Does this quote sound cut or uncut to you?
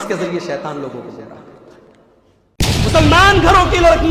cut